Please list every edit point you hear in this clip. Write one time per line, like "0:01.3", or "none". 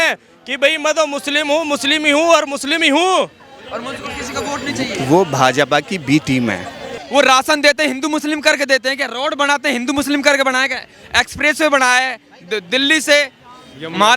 0:07.0